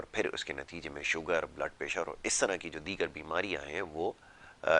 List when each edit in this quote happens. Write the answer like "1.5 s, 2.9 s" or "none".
none